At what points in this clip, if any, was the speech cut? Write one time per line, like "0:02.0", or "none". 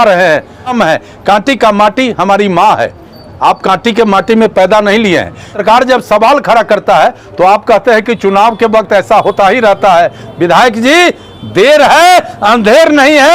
0:00.7
0:05.6